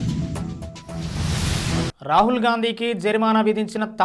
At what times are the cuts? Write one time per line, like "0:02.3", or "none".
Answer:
0:01.9